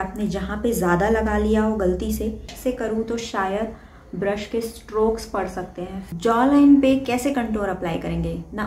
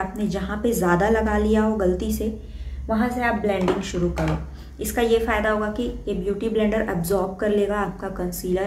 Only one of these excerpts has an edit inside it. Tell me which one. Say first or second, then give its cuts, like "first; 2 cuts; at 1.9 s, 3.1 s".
first; 2 cuts; at 2.5 s, 6.0 s